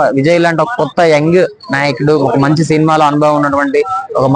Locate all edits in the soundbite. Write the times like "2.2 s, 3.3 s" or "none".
none